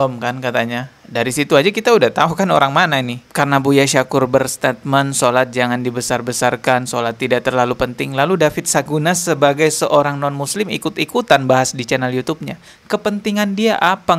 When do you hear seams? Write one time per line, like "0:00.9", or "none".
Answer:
0:03.2